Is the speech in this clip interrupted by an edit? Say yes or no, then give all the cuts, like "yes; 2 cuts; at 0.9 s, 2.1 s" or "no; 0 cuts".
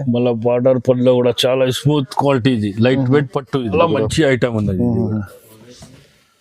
yes; 1 cut; at 3.7 s